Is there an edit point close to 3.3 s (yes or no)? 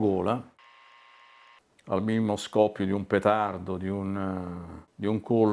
no